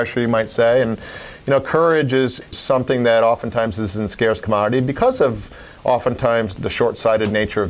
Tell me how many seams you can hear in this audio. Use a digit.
0